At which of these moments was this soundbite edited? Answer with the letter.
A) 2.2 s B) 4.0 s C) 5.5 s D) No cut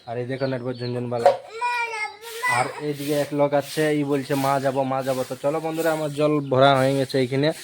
D